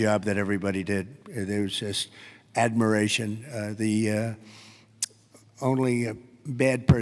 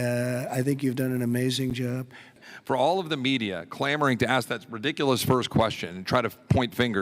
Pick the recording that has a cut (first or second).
second